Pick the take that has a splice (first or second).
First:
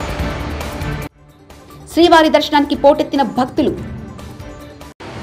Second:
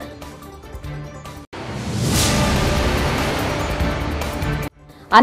first